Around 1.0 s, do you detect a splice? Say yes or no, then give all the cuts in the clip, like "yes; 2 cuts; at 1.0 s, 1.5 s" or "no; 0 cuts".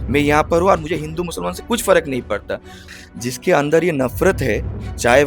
no; 1 cut; at 2.8 s